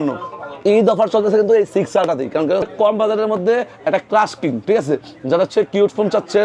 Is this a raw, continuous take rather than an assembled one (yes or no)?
no